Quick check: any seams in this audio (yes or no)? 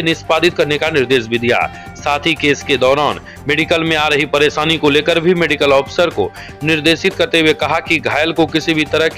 no